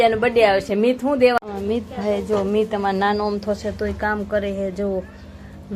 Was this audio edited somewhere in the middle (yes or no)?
yes